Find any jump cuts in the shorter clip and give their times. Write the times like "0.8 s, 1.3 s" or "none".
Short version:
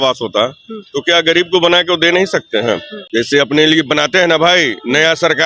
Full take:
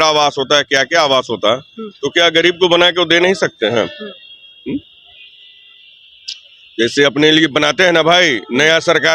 2.9 s